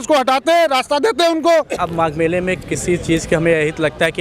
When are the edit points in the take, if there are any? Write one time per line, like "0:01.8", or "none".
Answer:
0:01.8